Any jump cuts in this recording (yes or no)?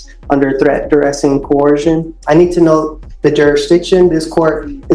yes